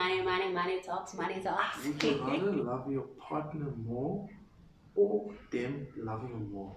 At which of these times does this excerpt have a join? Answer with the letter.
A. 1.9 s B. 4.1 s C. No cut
A